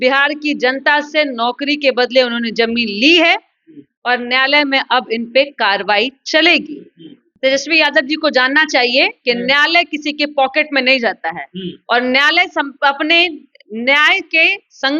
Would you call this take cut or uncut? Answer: cut